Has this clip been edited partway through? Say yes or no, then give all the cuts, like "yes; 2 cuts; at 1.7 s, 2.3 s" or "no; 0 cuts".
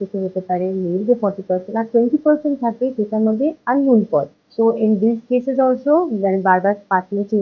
yes; 1 cut; at 4.4 s